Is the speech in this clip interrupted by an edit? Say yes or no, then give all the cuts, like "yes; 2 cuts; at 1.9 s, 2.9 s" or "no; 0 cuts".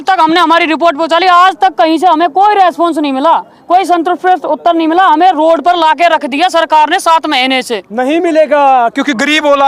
no; 0 cuts